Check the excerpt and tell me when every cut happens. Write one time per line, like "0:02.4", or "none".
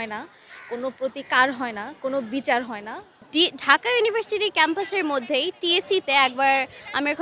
0:03.2